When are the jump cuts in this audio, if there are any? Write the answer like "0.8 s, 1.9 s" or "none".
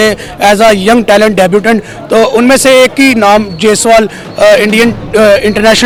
none